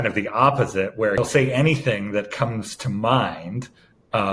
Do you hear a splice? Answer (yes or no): yes